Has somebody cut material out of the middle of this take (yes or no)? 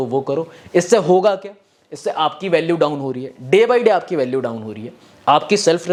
no